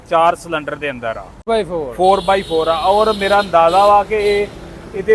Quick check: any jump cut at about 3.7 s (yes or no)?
no